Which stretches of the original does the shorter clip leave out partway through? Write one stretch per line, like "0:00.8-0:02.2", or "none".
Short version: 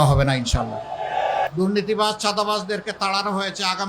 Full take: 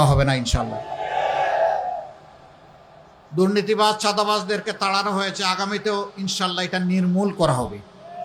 0:01.5-0:03.3